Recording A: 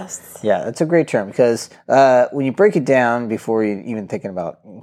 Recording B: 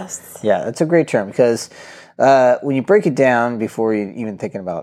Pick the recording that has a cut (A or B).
A